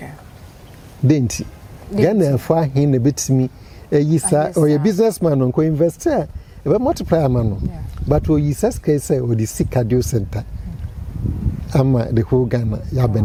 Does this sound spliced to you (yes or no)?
no